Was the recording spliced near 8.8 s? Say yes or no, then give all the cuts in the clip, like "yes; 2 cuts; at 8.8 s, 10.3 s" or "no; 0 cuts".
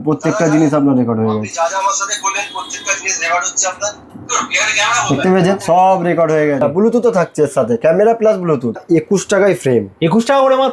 yes; 2 cuts; at 6.6 s, 8.8 s